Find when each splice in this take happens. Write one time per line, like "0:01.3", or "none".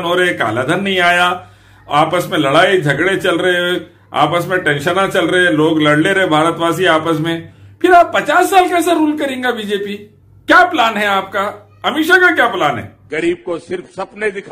0:12.9